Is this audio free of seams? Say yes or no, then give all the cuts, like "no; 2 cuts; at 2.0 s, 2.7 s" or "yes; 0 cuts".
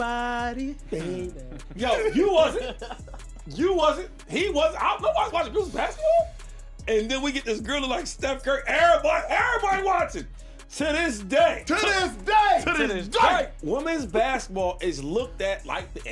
no; 1 cut; at 15.0 s